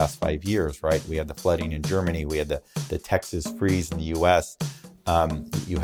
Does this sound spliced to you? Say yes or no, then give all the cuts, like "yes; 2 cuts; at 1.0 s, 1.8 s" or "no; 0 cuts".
no; 0 cuts